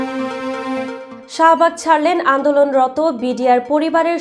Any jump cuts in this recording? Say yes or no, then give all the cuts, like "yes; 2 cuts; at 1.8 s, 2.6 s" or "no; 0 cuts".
no; 0 cuts